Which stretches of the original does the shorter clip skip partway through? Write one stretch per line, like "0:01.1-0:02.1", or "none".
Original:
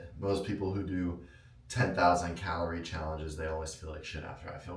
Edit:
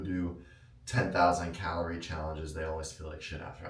none